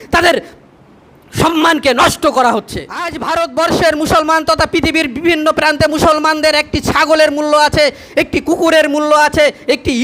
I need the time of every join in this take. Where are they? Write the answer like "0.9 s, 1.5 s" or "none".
3.1 s